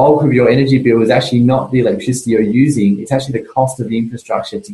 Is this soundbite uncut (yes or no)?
yes